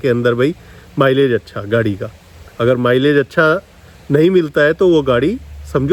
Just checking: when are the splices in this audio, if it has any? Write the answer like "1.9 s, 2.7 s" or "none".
none